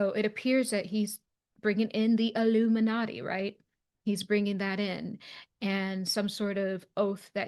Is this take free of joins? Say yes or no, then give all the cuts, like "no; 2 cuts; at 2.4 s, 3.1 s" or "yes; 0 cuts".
yes; 0 cuts